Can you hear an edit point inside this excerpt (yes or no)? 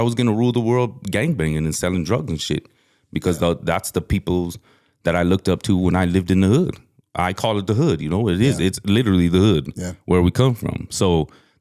no